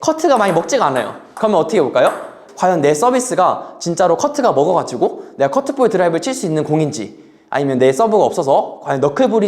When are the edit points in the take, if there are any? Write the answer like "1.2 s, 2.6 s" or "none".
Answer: 2.3 s